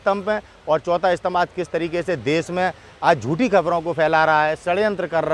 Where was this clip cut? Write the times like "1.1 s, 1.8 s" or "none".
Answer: none